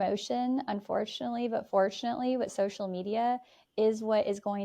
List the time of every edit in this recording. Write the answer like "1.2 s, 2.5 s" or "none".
none